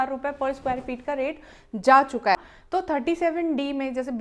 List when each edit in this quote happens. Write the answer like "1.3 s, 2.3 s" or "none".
2.4 s